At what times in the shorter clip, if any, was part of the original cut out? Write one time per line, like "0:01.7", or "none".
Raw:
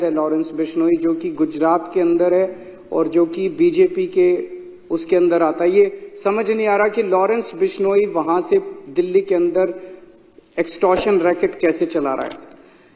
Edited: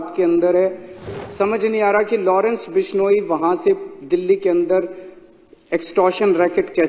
0:01.1